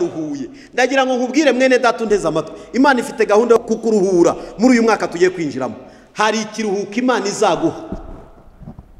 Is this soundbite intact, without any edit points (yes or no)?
no